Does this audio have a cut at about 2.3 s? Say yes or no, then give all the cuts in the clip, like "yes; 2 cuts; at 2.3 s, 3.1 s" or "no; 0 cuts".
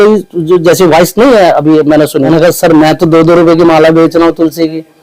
yes; 1 cut; at 2.3 s